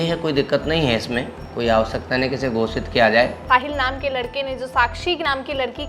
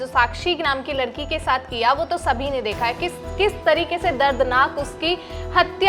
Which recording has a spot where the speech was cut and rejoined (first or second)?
first